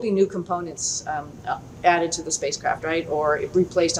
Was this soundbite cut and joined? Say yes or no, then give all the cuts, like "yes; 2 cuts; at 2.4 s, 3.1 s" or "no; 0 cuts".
no; 0 cuts